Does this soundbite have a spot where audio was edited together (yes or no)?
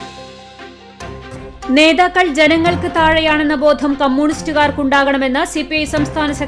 yes